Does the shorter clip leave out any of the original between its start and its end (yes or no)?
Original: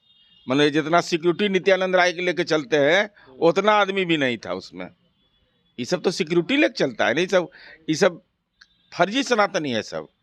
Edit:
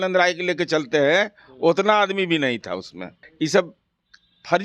yes